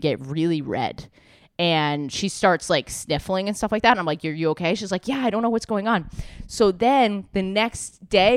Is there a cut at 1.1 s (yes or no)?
no